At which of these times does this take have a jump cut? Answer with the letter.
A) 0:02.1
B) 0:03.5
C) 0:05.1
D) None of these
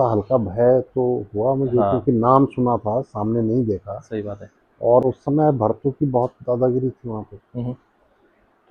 D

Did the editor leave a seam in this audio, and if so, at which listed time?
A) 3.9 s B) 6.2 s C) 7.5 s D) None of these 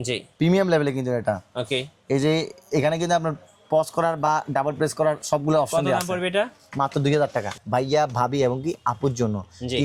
C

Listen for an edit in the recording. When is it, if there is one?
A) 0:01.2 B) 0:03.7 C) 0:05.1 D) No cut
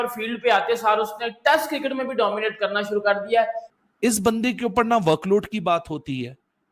B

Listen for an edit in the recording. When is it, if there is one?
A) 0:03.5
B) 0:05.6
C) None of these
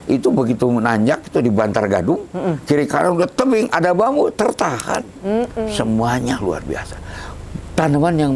B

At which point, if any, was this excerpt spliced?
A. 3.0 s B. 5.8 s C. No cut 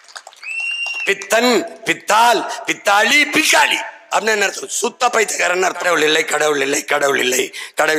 B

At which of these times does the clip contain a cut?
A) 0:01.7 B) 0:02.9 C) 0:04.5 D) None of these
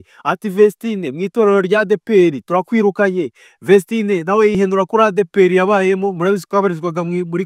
C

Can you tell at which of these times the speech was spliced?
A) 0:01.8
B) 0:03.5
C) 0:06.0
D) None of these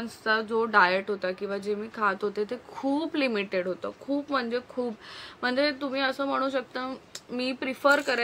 D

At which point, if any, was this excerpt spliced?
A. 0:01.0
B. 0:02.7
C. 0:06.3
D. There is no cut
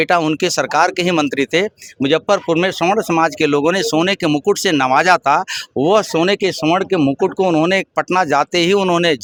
D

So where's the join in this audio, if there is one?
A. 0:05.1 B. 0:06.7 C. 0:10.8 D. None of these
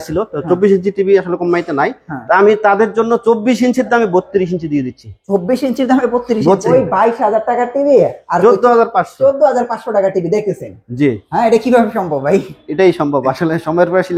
B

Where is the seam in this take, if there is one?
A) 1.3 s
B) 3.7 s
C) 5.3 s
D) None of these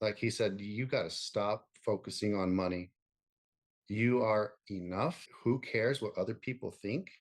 C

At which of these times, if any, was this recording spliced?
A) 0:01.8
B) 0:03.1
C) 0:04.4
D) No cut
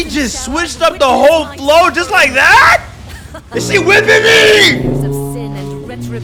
D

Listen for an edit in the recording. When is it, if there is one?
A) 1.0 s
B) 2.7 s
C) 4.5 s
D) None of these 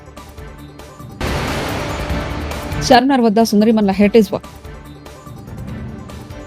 B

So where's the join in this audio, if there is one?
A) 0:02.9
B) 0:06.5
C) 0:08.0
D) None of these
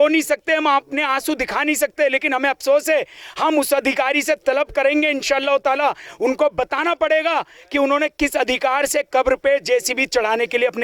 D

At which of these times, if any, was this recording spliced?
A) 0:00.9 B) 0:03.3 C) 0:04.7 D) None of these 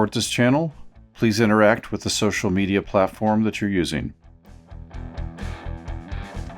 C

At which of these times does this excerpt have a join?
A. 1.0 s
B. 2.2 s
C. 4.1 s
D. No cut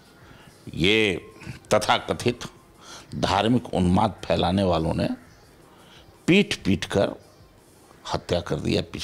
D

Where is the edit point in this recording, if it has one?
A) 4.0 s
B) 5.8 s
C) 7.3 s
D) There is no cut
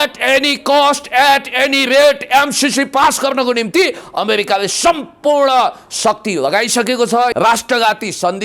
C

